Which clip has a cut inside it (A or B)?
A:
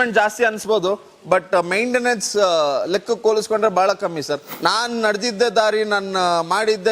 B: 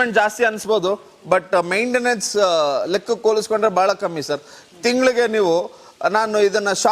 A